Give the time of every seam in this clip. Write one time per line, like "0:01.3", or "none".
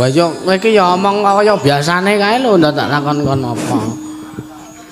none